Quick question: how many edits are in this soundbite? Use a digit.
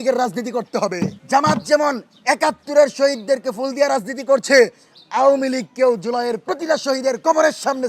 1